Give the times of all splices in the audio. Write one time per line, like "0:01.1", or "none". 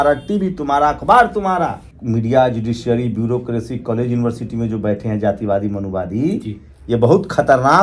0:01.9

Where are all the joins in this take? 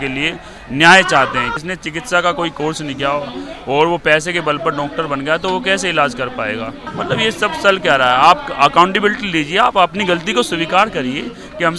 0:01.5
0:06.9

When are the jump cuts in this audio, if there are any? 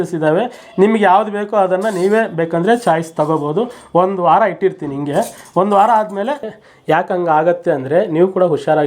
0:06.5

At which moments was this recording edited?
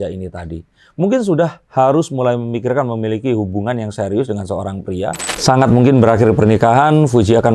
0:05.3

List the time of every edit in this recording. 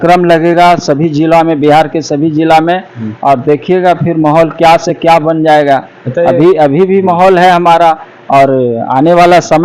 none

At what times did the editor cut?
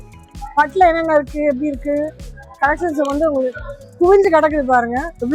none

